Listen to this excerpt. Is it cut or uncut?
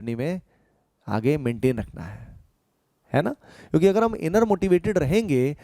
uncut